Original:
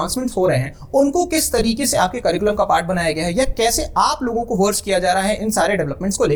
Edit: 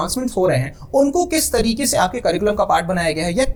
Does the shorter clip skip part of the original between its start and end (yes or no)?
no